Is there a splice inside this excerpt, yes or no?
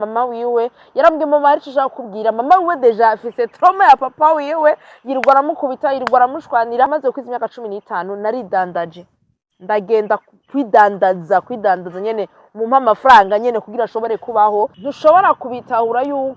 yes